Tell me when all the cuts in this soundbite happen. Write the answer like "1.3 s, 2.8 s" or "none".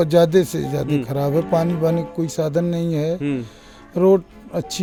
none